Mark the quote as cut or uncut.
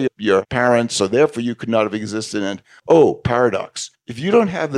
cut